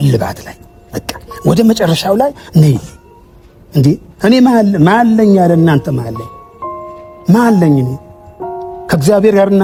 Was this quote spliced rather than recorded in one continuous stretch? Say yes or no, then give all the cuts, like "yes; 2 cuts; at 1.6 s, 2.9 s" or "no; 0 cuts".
no; 0 cuts